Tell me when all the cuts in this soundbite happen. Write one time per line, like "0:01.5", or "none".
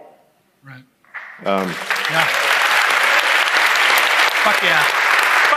none